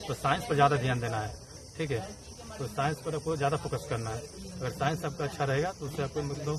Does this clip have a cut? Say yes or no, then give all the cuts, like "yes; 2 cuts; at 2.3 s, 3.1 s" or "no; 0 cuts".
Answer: no; 0 cuts